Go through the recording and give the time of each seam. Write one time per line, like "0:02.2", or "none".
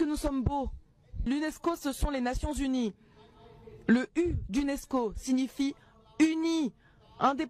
0:01.3